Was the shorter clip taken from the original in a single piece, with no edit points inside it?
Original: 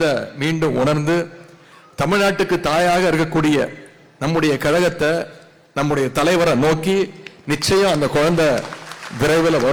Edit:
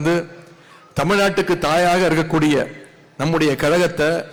yes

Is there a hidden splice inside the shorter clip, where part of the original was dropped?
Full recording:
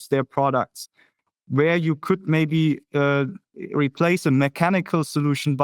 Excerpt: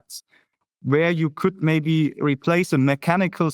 yes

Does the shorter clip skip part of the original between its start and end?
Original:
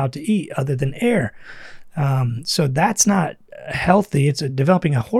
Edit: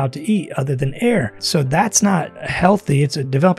yes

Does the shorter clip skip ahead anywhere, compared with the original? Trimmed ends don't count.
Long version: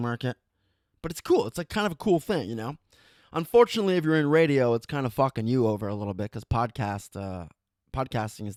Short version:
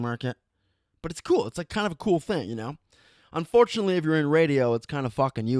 no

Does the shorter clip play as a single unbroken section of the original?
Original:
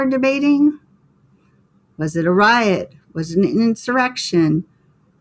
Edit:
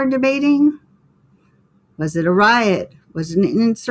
yes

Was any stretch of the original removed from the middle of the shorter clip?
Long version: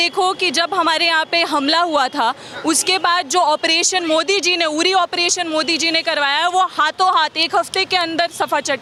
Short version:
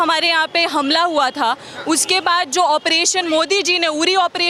no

